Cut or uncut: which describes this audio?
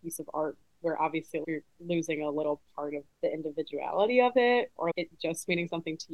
uncut